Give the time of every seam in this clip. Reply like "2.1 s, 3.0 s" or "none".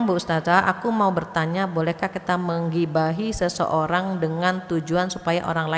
none